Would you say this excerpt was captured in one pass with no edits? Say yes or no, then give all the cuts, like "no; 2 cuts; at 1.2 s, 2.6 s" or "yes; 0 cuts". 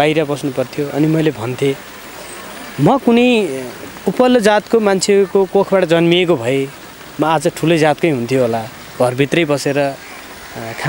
yes; 0 cuts